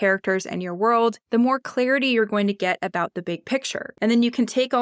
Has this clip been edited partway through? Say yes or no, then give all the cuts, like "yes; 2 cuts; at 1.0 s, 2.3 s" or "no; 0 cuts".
yes; 1 cut; at 3.9 s